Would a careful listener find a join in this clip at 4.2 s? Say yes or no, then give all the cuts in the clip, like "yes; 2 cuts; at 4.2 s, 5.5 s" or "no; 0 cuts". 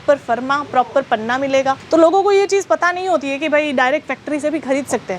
no; 1 cut; at 1.8 s